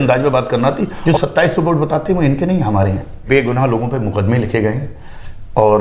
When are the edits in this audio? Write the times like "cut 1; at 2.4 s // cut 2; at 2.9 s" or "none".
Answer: cut 1; at 0.9 s // cut 2; at 3.3 s